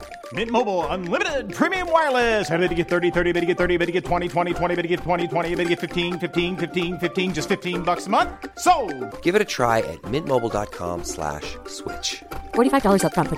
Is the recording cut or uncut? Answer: uncut